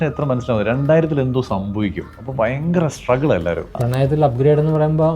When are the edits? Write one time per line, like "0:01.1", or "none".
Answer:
0:03.8